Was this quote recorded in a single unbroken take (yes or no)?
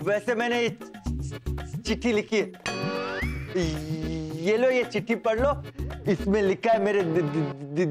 yes